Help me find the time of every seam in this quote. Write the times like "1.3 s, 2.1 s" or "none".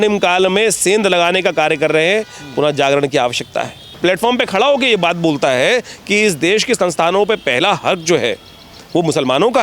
3.8 s